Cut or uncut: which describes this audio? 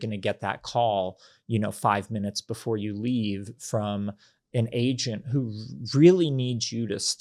uncut